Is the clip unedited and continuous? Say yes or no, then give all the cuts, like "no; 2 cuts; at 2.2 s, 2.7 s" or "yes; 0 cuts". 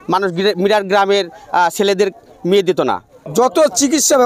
no; 1 cut; at 3.1 s